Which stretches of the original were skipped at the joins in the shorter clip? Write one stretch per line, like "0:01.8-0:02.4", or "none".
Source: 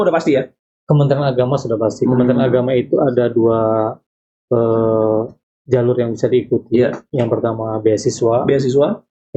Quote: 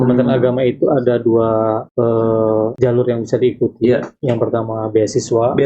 0:04.0-0:04.4
0:05.3-0:05.6